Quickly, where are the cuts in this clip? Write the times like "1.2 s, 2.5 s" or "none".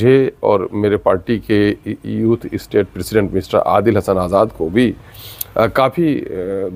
none